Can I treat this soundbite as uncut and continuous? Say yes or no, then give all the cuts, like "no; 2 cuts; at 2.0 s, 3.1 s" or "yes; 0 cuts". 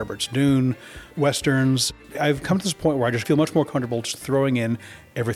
no; 2 cuts; at 1.9 s, 3.2 s